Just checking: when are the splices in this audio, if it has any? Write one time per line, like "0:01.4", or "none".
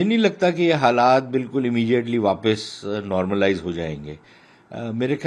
none